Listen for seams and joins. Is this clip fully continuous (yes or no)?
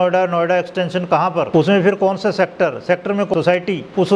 no